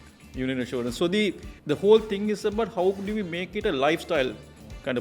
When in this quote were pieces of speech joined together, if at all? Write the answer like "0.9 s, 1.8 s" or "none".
1.5 s